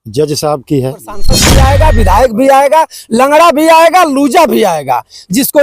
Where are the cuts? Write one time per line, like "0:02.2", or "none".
0:01.4